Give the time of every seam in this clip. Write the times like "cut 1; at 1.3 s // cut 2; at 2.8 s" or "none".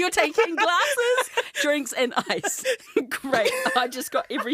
cut 1; at 2.8 s